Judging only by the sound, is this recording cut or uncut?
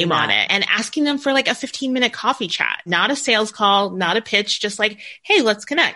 uncut